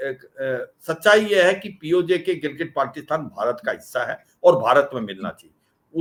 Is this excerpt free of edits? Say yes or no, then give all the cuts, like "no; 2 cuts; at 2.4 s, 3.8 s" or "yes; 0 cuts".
yes; 0 cuts